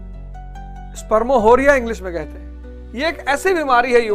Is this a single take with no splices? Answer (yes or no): no